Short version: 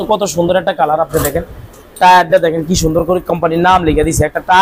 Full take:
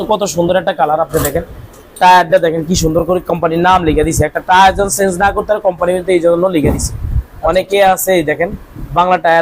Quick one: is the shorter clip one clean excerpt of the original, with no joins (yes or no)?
yes